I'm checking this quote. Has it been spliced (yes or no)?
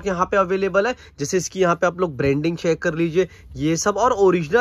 no